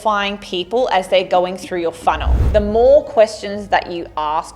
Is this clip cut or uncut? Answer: cut